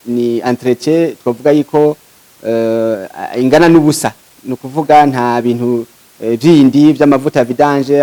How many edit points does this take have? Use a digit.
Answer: 0